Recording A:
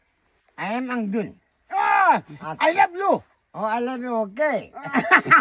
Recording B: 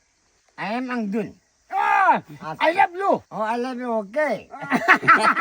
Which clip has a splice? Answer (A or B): B